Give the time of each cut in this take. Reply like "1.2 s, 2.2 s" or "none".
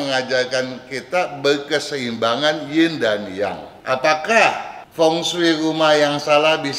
3.7 s